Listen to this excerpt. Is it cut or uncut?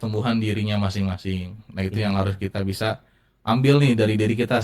uncut